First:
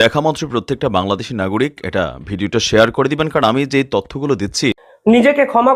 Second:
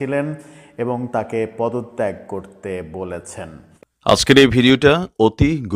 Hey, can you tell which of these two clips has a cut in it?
second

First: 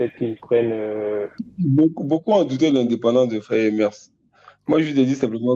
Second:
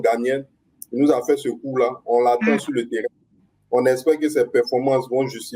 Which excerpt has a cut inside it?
first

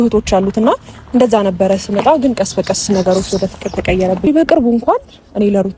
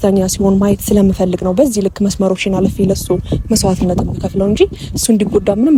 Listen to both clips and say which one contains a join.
first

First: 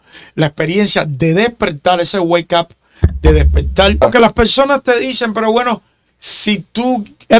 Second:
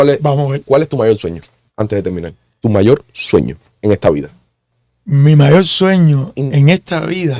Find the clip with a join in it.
first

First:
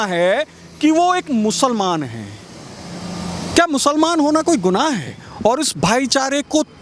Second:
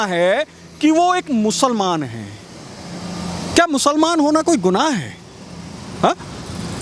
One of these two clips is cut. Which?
first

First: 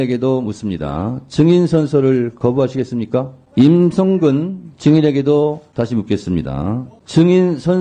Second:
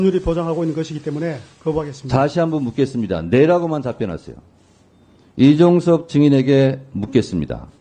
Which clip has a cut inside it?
first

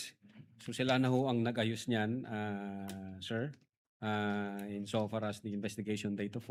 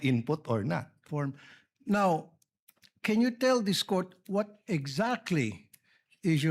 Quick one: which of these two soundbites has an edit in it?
second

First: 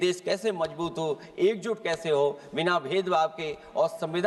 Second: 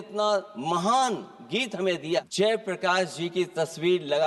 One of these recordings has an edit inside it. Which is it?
second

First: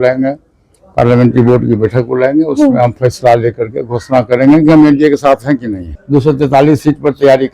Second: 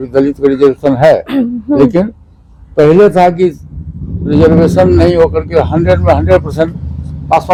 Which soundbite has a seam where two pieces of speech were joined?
first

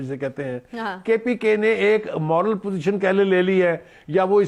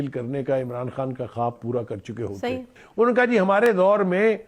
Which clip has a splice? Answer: second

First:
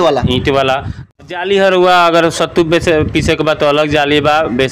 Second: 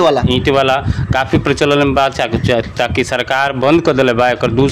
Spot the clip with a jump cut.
first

